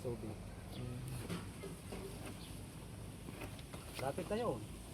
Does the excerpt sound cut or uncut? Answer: uncut